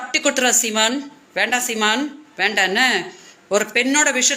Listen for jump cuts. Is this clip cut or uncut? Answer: uncut